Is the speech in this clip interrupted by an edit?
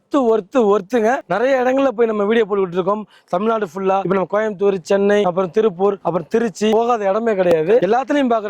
yes; 5 cuts; at 1.3 s, 4.0 s, 5.2 s, 6.6 s, 7.8 s

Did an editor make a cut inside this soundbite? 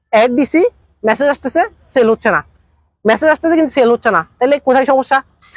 no; 0 cuts

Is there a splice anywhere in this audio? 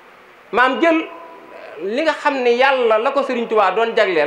no; 0 cuts

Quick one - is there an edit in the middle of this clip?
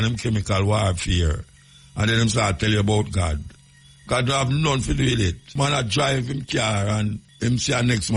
yes; 2 cuts; at 5.4 s, 7.3 s

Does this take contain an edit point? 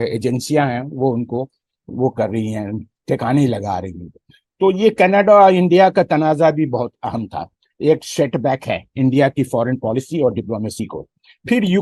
no; 0 cuts

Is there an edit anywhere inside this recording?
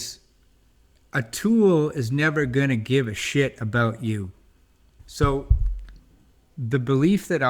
no; 0 cuts

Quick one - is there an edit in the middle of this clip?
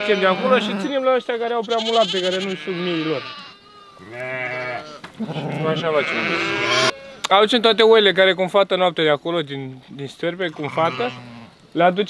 yes; 1 cut; at 6.9 s

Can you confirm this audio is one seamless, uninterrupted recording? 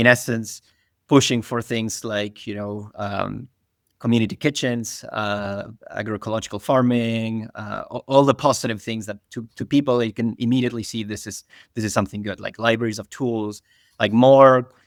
yes; 0 cuts

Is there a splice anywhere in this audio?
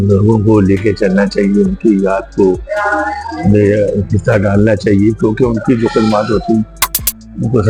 no; 0 cuts

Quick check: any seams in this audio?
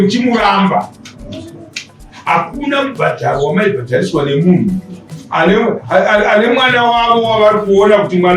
no; 0 cuts

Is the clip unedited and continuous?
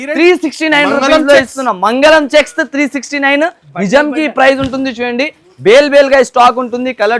yes; 0 cuts

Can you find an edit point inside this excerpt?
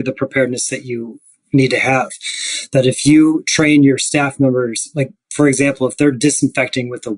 yes; 1 cut; at 1.2 s

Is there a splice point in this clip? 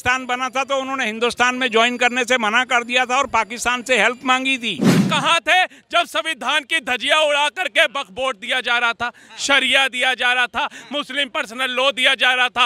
yes; 1 cut; at 5.1 s

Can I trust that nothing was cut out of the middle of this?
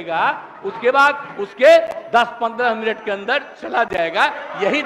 yes; 0 cuts

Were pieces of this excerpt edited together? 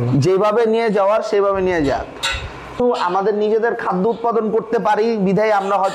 yes; 1 cut; at 2.8 s

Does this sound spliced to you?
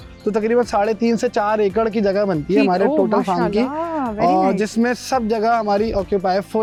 no; 0 cuts

